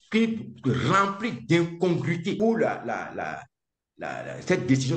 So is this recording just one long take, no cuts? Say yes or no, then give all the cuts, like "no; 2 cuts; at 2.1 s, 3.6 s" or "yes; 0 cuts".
no; 1 cut; at 2.4 s